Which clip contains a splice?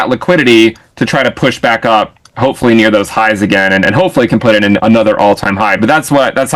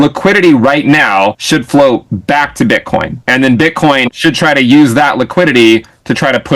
second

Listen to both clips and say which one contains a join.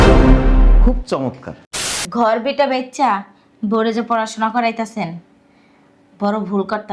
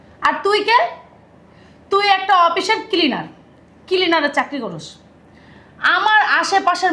first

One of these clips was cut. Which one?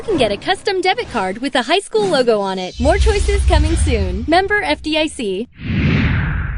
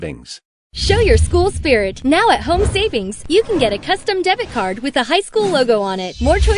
first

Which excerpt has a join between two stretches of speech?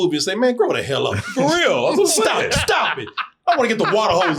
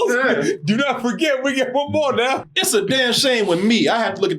second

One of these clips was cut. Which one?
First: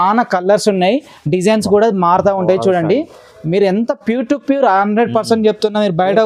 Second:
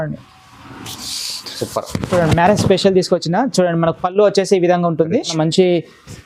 second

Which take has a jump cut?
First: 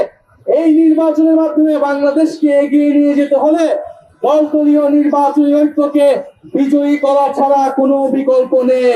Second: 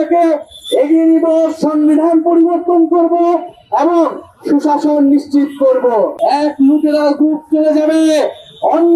second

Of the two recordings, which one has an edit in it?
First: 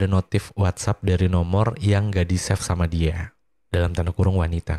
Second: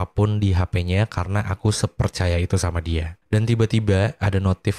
second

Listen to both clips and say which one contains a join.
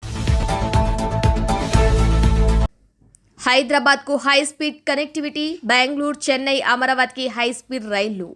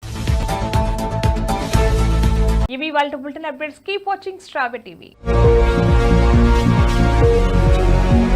first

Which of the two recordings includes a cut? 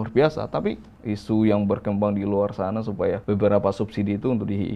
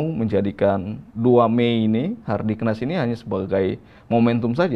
first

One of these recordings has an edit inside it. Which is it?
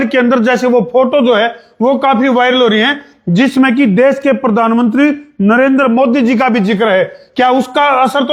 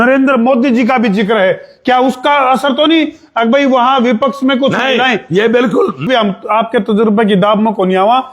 second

